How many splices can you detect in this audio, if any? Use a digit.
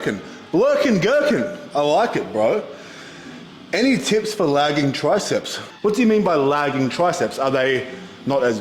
1